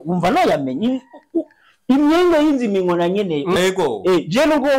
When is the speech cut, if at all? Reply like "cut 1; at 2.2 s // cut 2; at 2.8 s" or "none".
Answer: cut 1; at 3.6 s